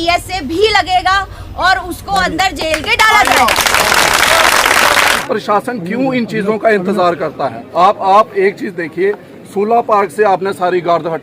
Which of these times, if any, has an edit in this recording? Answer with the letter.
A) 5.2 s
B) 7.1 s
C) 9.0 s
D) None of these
A